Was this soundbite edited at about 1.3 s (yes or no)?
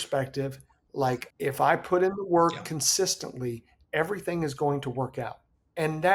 yes